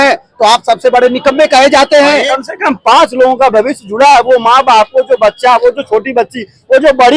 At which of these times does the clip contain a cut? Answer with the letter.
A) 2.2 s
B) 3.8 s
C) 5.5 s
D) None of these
A